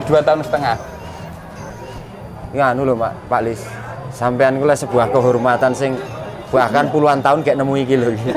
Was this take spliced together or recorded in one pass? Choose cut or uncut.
cut